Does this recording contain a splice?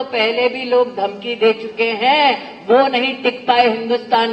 no; 0 cuts

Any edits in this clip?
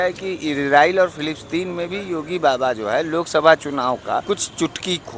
yes; 1 cut; at 4.2 s

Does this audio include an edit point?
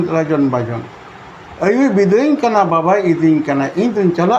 no; 0 cuts

